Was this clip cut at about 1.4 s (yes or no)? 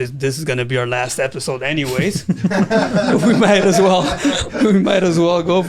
no